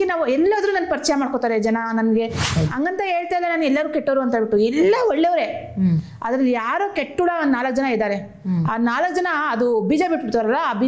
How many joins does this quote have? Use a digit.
1